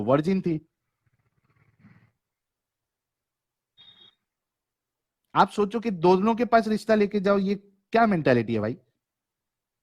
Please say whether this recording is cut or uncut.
uncut